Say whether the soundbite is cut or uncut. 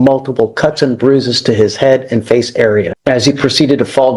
cut